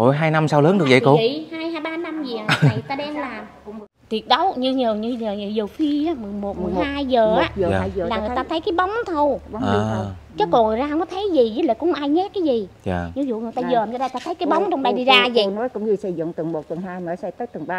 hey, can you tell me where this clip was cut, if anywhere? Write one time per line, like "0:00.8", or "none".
0:04.0